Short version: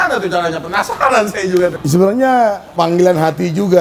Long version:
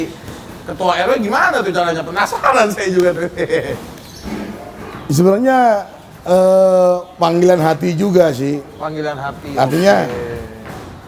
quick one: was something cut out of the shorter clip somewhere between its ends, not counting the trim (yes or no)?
yes